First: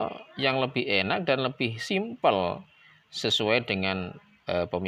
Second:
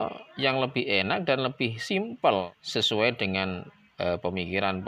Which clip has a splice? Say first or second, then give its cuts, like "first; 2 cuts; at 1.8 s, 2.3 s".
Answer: second; 1 cut; at 2.6 s